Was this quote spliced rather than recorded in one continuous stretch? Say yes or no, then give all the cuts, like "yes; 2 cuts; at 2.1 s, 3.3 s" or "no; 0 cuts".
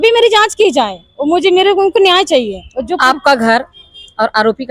no; 0 cuts